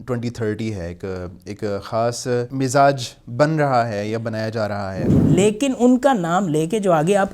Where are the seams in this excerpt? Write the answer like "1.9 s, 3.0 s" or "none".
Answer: 2.5 s, 5.1 s